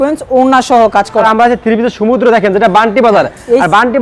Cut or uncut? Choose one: cut